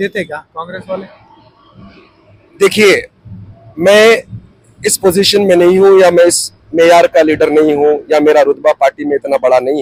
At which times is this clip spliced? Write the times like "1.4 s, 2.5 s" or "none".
none